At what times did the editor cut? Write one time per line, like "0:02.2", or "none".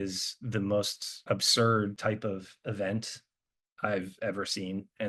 0:01.1
0:02.0